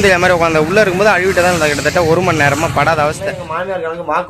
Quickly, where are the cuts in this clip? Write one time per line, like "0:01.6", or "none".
0:03.4